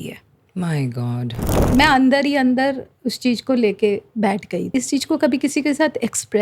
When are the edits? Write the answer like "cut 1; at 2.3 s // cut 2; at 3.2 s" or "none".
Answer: cut 1; at 1.5 s // cut 2; at 4.7 s